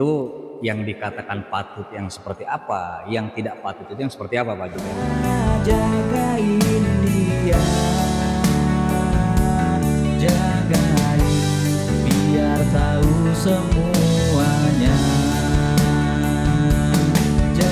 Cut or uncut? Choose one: cut